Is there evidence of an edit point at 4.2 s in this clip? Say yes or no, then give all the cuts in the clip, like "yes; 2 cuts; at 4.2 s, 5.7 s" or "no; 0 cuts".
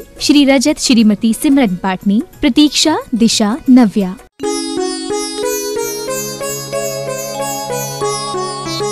yes; 1 cut; at 4.2 s